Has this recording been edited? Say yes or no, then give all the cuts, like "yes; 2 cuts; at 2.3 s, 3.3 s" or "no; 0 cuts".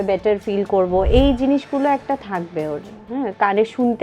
no; 0 cuts